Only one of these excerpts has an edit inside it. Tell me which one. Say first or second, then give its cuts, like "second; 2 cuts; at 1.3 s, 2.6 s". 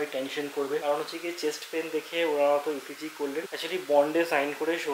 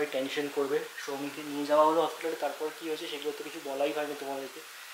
first; 2 cuts; at 0.8 s, 3.5 s